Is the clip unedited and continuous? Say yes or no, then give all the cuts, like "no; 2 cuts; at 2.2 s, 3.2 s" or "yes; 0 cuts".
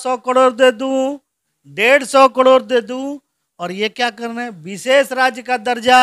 yes; 0 cuts